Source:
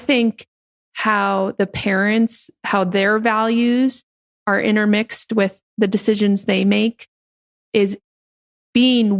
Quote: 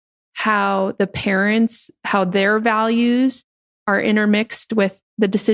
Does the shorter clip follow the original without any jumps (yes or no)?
yes